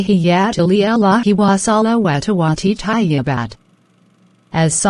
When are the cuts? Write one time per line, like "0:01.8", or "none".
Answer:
0:01.5